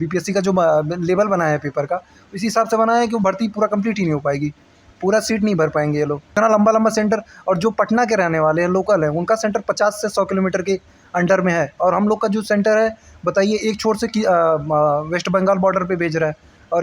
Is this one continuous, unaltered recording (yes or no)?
no